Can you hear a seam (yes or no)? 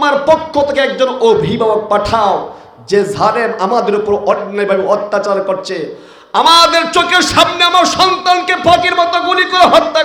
no